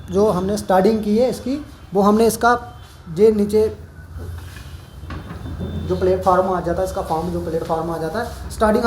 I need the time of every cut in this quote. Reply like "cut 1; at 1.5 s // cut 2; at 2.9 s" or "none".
none

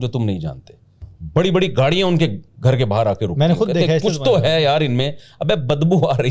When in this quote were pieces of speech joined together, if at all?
cut 1; at 1.1 s

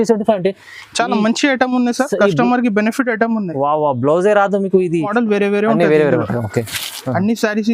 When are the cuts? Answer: cut 1; at 5.1 s

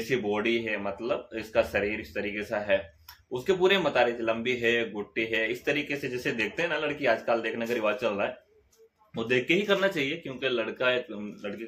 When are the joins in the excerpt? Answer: none

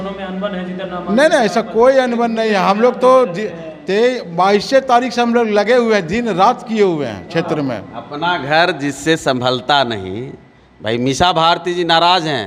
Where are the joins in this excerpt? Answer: none

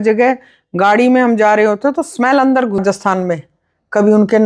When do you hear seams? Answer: cut 1; at 2.8 s

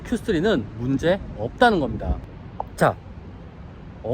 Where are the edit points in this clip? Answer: cut 1; at 2.3 s

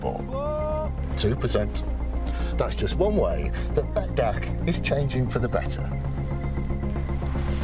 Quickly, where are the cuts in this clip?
none

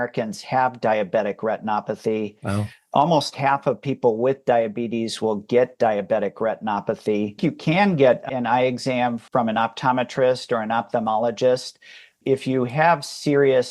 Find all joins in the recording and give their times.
cut 1; at 7.4 s

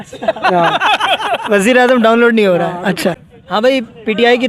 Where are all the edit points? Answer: cut 1; at 3.1 s

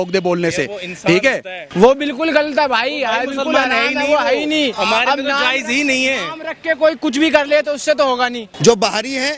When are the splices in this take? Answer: cut 1; at 1.7 s // cut 2; at 8.5 s

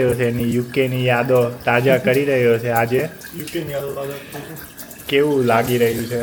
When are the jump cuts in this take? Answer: none

